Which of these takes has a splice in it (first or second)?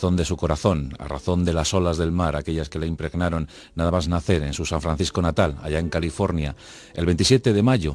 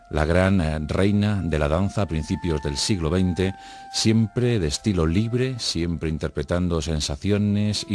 first